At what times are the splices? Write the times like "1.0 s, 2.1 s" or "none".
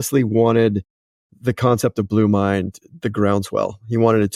none